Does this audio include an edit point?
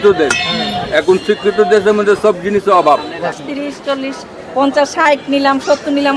yes; 1 cut; at 3.3 s

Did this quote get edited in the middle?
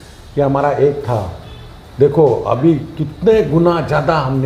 no; 0 cuts

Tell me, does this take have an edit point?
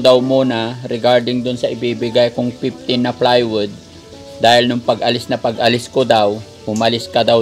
no; 0 cuts

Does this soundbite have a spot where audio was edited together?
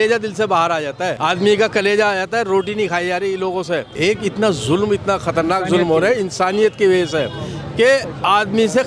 yes; 2 cuts; at 1.2 s, 3.9 s

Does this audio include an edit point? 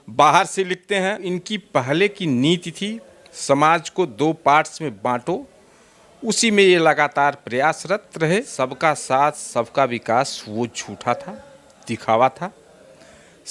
yes; 2 cuts; at 1.4 s, 8.5 s

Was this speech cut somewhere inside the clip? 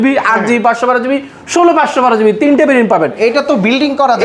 no; 0 cuts

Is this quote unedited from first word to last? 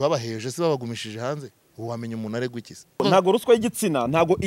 no; 1 cut; at 3.0 s

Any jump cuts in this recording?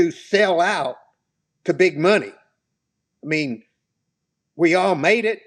no; 0 cuts

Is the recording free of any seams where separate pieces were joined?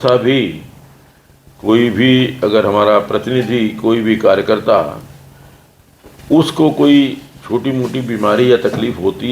yes; 0 cuts

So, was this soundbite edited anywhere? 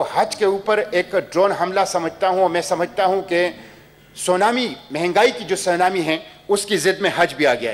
no; 0 cuts

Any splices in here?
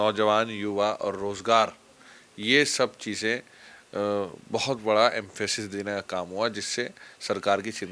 no; 0 cuts

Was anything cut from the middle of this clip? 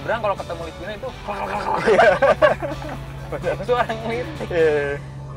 no; 0 cuts

